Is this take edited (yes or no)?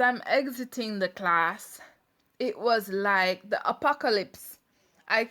no